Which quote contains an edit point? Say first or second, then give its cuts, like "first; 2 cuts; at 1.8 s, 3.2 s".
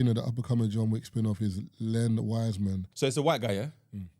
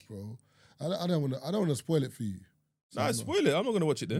first; 1 cut; at 2.9 s